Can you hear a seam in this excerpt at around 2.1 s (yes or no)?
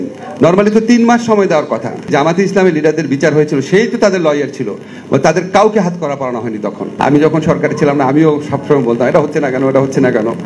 yes